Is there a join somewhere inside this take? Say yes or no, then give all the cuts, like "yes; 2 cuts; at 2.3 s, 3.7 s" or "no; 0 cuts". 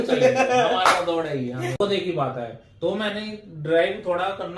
yes; 1 cut; at 1.8 s